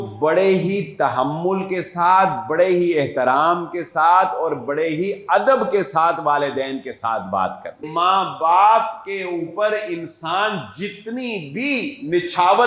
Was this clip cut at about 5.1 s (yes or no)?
no